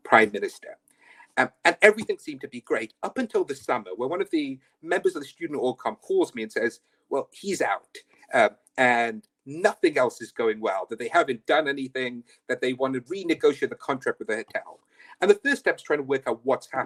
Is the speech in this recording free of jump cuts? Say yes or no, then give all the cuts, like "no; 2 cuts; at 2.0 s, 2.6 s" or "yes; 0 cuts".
yes; 0 cuts